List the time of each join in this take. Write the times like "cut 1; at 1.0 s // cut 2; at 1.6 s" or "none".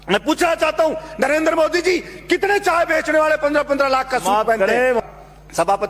cut 1; at 5.0 s